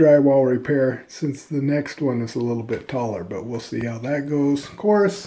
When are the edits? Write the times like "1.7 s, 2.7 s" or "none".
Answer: none